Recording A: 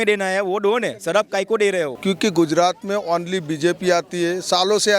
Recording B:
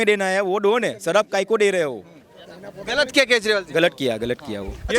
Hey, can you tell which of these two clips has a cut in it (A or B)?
A